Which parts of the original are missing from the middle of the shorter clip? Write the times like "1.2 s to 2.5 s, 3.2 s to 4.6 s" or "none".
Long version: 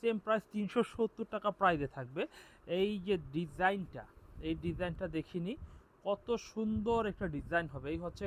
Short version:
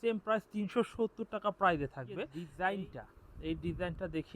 2.4 s to 3.4 s